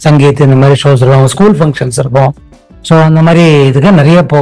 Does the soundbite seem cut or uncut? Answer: uncut